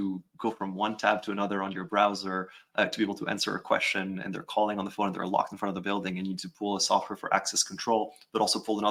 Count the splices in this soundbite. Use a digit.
0